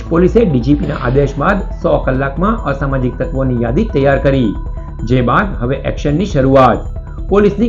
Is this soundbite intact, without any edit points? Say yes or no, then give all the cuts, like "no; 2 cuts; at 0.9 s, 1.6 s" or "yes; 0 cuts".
yes; 0 cuts